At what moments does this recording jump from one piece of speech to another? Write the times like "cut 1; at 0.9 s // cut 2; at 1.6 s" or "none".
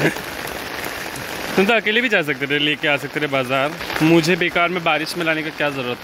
none

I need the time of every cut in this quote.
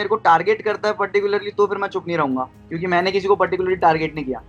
none

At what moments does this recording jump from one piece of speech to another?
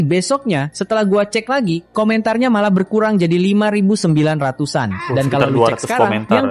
none

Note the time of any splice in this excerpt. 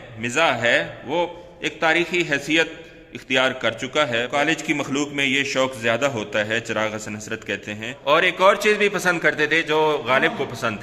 cut 1; at 4.3 s // cut 2; at 7.8 s

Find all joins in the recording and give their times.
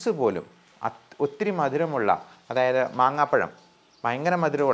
none

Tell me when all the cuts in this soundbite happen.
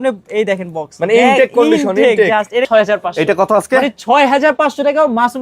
cut 1; at 2.7 s

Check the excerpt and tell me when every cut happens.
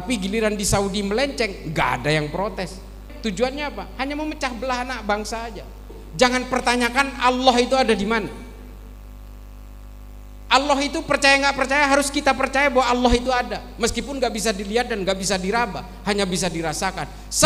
cut 1; at 3.1 s // cut 2; at 5.9 s

